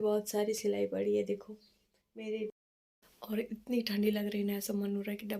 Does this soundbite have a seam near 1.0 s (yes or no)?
no